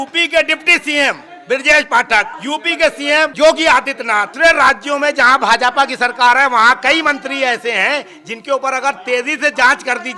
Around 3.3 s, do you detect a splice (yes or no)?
yes